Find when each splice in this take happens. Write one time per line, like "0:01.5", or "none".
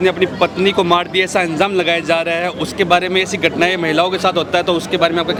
none